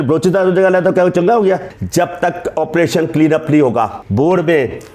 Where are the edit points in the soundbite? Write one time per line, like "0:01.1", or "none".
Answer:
0:01.8
0:04.0